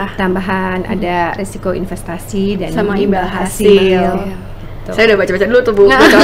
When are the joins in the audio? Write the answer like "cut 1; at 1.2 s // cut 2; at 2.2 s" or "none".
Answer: none